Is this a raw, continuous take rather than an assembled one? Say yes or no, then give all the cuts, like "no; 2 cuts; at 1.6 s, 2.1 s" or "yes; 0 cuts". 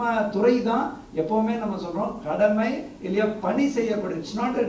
yes; 0 cuts